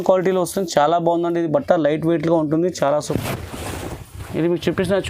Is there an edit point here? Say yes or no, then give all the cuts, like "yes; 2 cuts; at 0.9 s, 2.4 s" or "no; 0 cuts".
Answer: yes; 1 cut; at 3.1 s